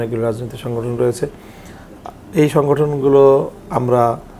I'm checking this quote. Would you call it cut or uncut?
uncut